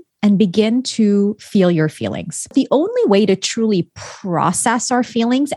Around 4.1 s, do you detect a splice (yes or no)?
no